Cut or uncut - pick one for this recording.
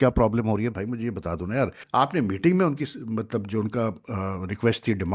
cut